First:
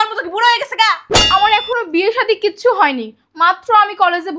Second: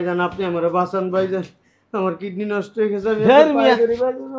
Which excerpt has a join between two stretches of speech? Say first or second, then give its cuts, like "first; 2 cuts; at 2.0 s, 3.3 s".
first; 1 cut; at 1.1 s